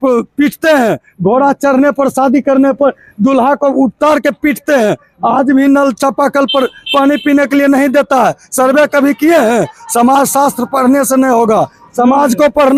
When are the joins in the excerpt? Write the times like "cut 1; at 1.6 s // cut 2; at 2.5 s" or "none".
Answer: none